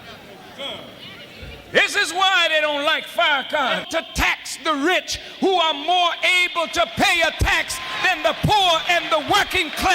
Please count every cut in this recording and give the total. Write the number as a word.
one